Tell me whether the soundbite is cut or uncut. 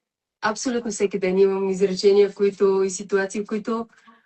uncut